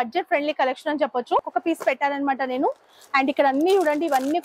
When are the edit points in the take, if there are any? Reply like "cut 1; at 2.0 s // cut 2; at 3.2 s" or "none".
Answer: cut 1; at 1.5 s